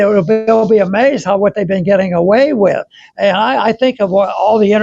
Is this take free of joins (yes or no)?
yes